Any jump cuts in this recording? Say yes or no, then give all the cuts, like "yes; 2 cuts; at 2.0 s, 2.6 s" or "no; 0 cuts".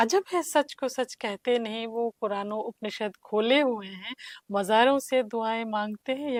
no; 0 cuts